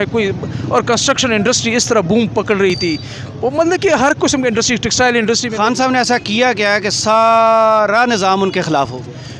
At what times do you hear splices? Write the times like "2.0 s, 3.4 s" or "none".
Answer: none